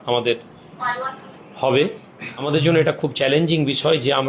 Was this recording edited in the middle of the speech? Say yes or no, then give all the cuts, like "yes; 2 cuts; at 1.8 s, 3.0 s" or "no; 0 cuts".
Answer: yes; 1 cut; at 2.5 s